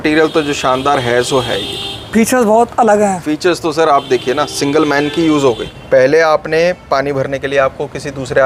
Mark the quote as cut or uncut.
uncut